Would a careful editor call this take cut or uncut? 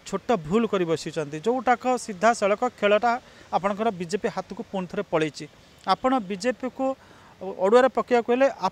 uncut